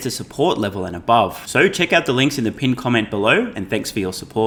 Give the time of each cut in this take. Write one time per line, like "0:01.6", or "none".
none